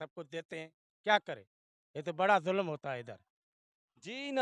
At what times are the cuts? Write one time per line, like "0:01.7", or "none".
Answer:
none